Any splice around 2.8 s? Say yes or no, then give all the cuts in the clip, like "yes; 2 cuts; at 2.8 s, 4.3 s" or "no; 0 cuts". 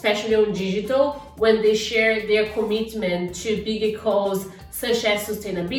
no; 0 cuts